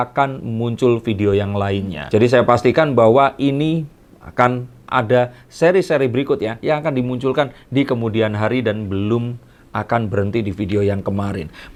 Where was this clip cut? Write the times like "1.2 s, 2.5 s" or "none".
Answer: none